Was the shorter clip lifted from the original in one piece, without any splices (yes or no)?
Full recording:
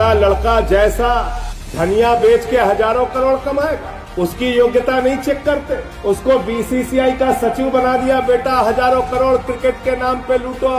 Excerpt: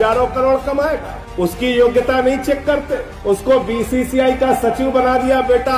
yes